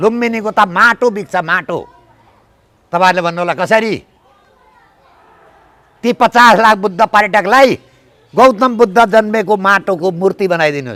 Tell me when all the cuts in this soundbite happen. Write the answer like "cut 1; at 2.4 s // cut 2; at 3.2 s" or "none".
none